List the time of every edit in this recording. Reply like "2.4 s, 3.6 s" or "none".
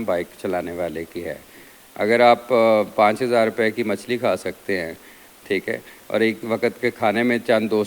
none